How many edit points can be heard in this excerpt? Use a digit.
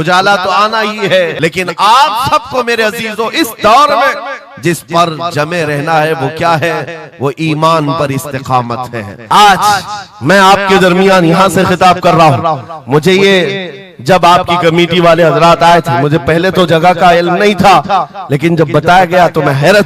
2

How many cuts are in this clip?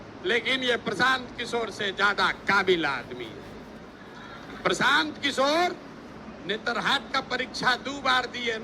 1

